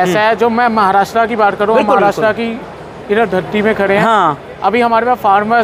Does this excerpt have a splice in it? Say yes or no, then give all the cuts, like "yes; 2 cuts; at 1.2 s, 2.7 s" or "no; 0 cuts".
no; 0 cuts